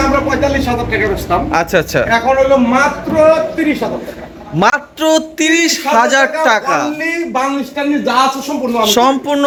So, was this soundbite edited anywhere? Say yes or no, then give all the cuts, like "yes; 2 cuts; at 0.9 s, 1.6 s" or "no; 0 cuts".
no; 0 cuts